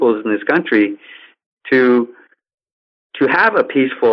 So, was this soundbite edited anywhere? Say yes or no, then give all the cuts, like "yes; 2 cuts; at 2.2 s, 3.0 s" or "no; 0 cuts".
no; 0 cuts